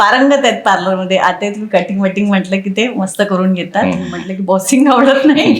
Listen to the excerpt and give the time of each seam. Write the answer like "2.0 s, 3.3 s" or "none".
4.6 s